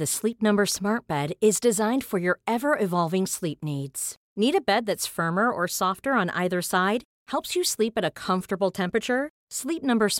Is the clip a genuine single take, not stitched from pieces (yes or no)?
yes